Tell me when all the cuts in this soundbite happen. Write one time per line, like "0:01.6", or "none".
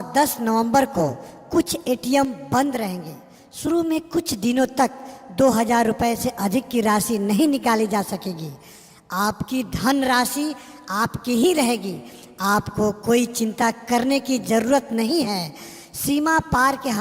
0:07.1